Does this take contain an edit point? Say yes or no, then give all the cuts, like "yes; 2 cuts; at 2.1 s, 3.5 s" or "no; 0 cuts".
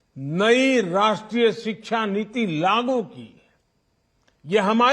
no; 0 cuts